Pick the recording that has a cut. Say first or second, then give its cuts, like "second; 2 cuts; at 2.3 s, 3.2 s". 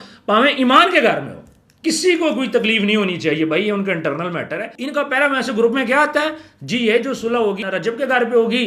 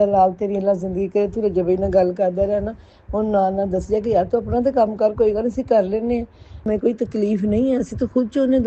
first; 2 cuts; at 4.8 s, 7.6 s